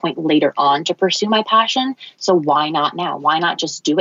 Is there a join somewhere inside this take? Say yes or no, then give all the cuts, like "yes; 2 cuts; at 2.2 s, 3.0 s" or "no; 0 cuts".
no; 0 cuts